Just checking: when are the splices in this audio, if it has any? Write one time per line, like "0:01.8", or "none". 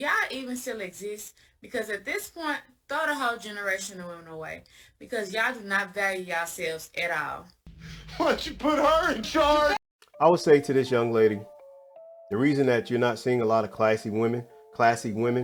none